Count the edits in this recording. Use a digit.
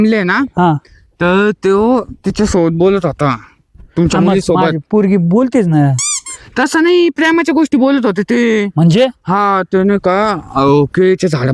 0